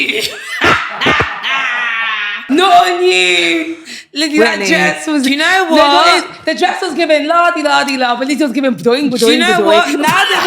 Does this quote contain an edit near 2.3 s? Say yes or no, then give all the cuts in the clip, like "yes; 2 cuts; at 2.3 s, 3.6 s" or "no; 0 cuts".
yes; 1 cut; at 2.3 s